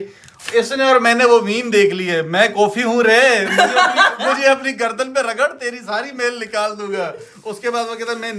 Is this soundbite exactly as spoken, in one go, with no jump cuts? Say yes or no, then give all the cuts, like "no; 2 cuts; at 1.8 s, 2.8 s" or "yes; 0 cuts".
yes; 0 cuts